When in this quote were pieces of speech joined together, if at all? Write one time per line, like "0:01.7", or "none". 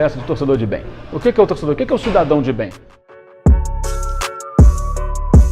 0:03.1